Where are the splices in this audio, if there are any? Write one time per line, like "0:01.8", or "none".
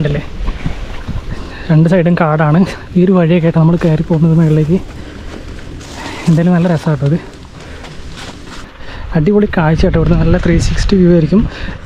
0:08.7